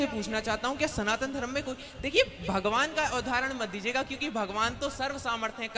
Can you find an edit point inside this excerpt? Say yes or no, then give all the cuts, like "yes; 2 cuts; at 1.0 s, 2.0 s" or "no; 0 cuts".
no; 0 cuts